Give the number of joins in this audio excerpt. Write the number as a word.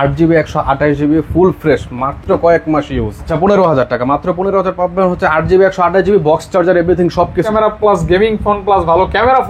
two